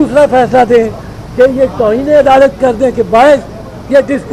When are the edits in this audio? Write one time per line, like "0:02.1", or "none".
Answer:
none